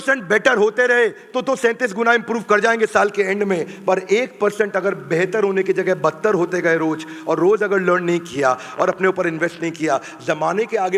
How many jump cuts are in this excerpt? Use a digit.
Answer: 0